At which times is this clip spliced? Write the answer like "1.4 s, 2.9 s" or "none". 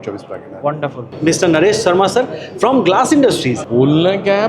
1.1 s, 3.6 s